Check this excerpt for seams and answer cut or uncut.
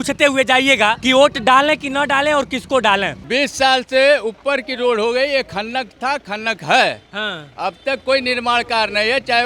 cut